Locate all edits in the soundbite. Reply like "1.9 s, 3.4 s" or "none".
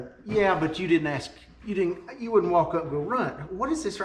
none